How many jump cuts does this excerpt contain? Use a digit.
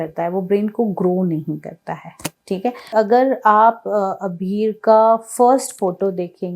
1